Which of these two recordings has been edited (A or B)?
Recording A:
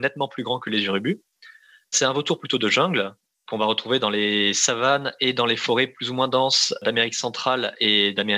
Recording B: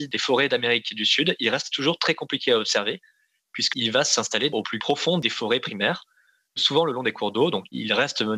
B